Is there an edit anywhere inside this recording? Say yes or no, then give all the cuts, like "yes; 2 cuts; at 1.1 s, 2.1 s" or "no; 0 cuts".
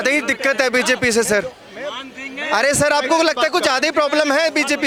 no; 0 cuts